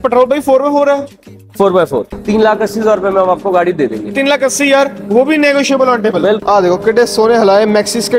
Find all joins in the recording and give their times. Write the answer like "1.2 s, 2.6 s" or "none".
2.1 s, 6.4 s